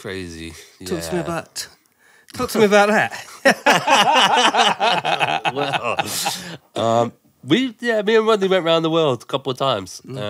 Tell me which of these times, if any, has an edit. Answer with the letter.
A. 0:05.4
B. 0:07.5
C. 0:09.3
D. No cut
D